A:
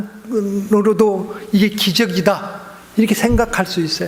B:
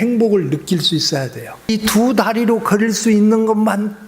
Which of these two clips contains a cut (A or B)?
B